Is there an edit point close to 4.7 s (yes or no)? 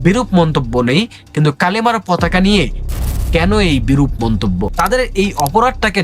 yes